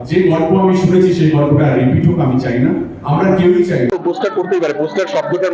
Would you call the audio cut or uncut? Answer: cut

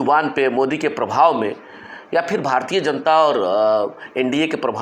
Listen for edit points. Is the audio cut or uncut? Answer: uncut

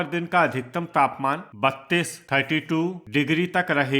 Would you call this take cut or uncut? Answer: uncut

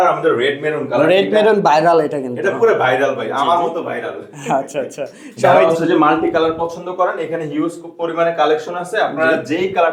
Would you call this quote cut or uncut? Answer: cut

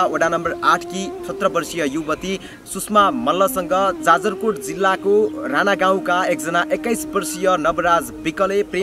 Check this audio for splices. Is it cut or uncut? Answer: uncut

